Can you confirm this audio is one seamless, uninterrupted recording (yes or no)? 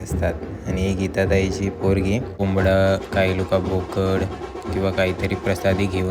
no